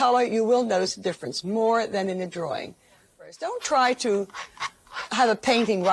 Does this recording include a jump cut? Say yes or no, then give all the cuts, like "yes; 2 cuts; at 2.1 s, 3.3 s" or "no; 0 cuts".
yes; 1 cut; at 3.5 s